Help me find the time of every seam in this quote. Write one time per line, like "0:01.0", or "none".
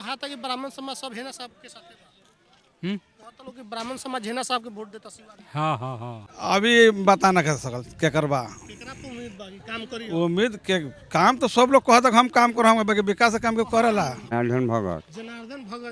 0:06.2
0:14.3

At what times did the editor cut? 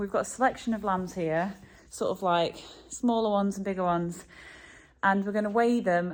none

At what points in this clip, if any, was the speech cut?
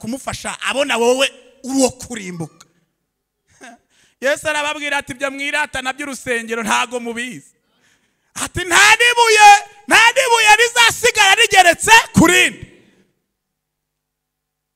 0:03.8

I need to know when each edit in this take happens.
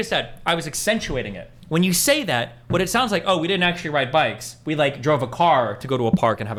none

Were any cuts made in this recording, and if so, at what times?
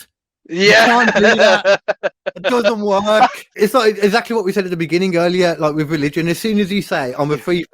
0:03.4

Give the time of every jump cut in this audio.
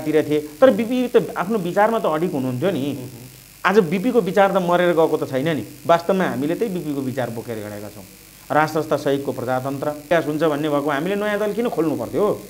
0:10.0

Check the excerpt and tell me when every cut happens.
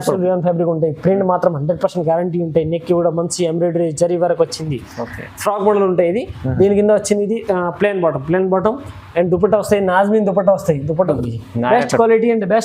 0:11.1

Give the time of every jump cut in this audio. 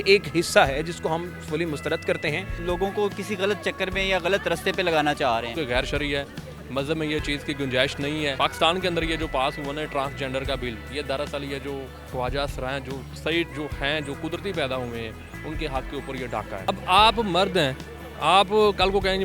0:02.6
0:05.5
0:16.5

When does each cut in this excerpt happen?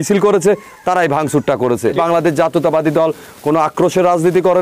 0:01.9

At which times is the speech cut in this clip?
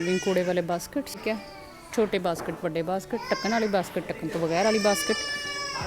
0:01.2

